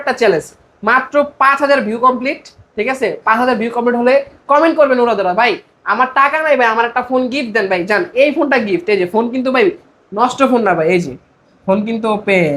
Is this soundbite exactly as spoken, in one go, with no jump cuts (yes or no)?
yes